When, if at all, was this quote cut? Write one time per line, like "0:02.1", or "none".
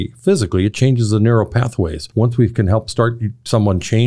0:02.0